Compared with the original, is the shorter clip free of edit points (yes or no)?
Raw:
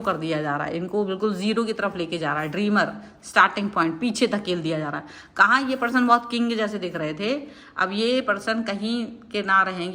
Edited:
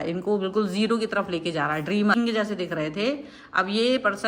no